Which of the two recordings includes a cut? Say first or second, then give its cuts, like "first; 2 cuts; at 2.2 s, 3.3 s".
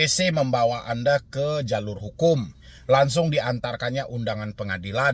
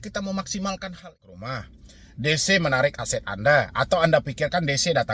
second; 1 cut; at 1.3 s